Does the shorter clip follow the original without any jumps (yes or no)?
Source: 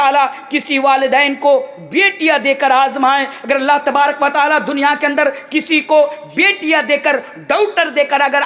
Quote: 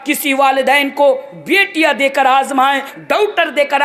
no